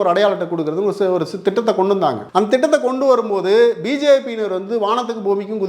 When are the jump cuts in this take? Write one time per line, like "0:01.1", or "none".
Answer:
0:02.2

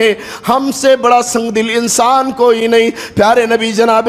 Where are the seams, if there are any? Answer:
none

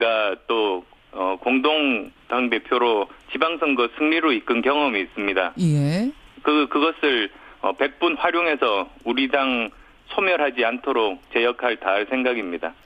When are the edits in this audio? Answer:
none

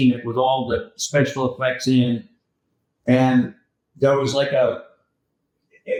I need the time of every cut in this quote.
none

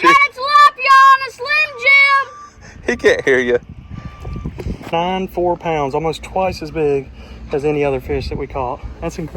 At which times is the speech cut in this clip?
0:04.8

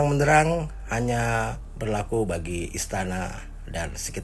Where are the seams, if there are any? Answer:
0:01.7

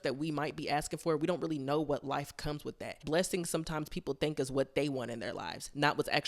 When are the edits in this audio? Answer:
0:03.0

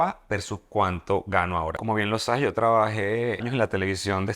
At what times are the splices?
0:01.8
0:03.5

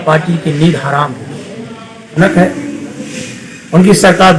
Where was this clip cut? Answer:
0:02.1

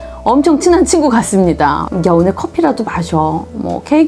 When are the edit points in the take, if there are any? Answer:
0:01.8

